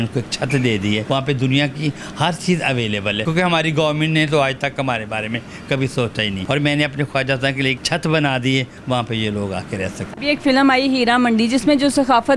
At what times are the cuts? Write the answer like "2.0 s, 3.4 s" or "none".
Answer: 1.0 s, 3.2 s, 6.4 s, 7.8 s, 10.1 s